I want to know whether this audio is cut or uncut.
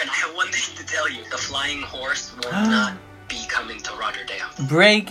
cut